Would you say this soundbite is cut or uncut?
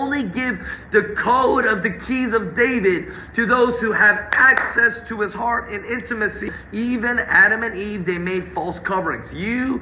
cut